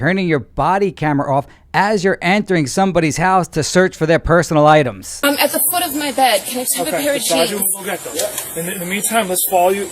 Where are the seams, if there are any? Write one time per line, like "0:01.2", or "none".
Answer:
none